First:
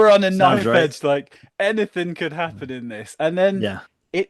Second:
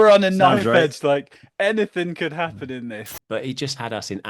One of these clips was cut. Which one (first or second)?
second